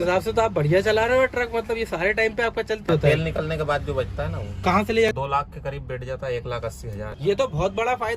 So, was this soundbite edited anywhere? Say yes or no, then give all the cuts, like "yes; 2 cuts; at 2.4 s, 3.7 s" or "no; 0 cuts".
yes; 3 cuts; at 2.9 s, 5.1 s, 7.1 s